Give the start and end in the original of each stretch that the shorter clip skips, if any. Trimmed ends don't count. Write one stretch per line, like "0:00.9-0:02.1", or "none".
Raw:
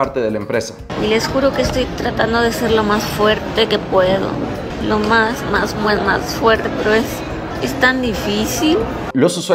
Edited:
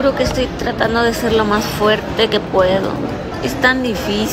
0:04.7-0:07.5